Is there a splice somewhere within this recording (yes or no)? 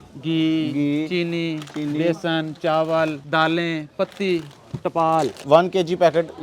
yes